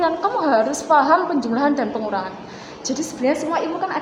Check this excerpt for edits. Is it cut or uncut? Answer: uncut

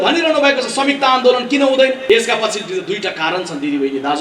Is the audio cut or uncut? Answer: cut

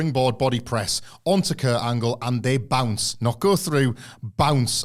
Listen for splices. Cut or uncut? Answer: uncut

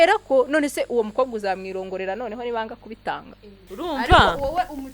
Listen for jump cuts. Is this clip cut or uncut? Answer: cut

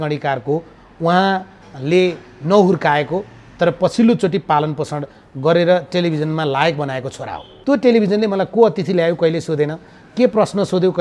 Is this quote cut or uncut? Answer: cut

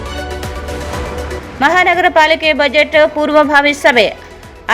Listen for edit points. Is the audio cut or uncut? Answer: uncut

